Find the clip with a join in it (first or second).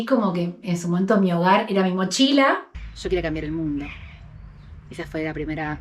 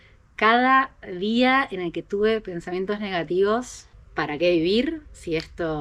first